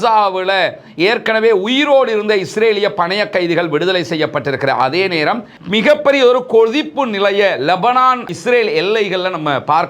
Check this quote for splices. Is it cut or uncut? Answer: cut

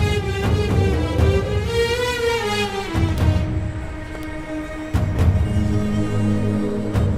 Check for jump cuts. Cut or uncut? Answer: uncut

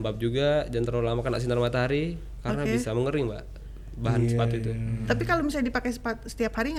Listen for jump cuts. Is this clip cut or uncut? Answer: uncut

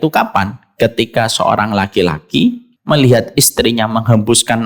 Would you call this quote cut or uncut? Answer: cut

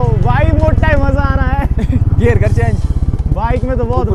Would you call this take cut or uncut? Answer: uncut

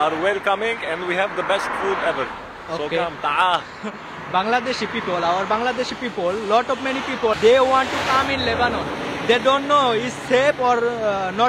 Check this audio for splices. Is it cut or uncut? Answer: cut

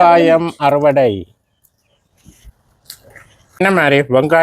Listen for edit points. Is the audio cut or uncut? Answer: cut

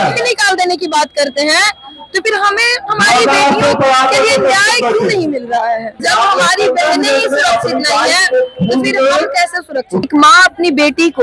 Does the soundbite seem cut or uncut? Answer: cut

